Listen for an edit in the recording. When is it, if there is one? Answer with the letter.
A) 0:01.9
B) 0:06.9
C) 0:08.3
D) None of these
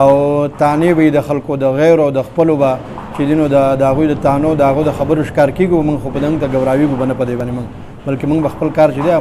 D